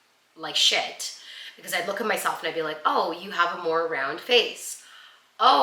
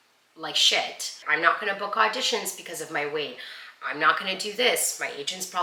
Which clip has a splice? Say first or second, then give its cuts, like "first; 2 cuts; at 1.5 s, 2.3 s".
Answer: second; 1 cut; at 1.2 s